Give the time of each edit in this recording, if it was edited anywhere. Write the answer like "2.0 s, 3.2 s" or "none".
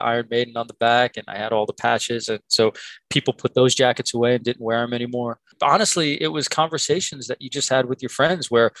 5.5 s